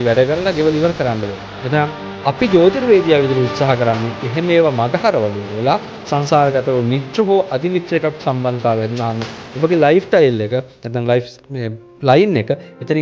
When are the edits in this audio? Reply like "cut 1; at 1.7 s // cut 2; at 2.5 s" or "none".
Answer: none